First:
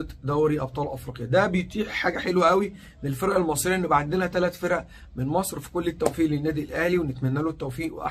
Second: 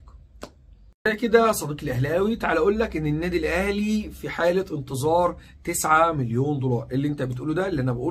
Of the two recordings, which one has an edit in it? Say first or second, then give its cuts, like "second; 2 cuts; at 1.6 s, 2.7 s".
second; 1 cut; at 0.9 s